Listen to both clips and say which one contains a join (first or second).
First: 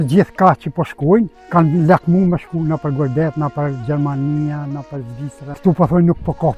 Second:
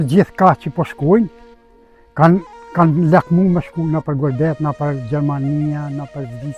first